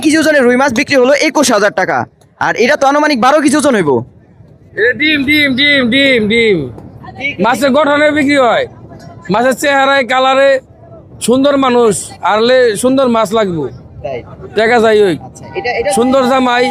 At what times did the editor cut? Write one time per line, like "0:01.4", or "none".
none